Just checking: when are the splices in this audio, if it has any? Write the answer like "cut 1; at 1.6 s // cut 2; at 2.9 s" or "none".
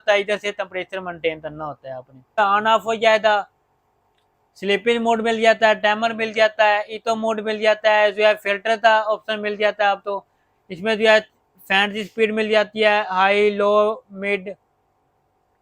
cut 1; at 2.4 s